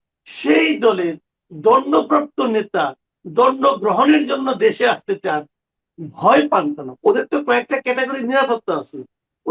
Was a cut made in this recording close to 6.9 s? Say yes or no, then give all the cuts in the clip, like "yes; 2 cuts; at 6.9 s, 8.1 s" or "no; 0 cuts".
yes; 1 cut; at 6.9 s